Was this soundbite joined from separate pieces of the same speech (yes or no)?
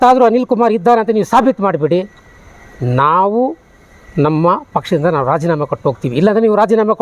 no